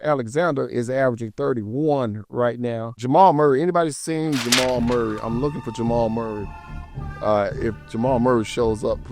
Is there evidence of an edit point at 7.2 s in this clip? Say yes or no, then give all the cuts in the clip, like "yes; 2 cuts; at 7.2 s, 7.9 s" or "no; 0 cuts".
no; 1 cut; at 3.0 s